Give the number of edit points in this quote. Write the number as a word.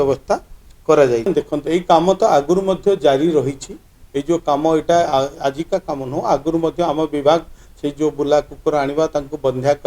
one